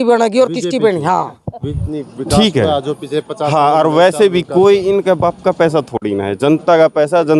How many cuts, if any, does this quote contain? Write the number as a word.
one